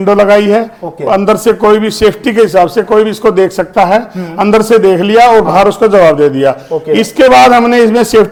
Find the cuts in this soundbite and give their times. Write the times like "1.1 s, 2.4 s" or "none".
none

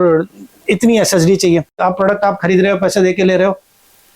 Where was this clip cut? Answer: 1.7 s

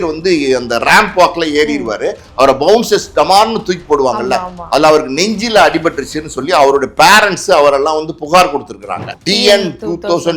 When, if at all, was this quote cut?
9.1 s

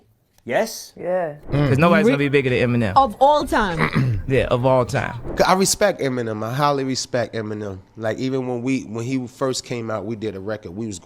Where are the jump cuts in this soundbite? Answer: 1.4 s, 5.2 s

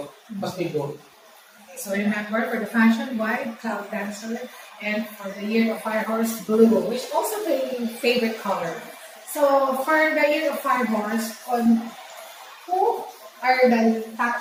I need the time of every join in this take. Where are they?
none

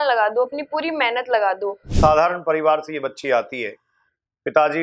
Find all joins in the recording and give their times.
1.8 s

